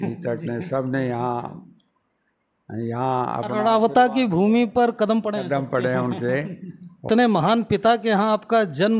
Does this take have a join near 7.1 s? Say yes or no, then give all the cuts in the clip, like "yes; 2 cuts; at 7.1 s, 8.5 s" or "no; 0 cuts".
yes; 1 cut; at 7.1 s